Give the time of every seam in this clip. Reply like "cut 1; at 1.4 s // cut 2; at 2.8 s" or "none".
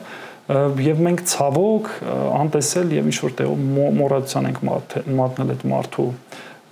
none